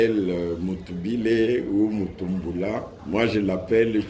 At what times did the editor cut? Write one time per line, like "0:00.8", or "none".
0:02.9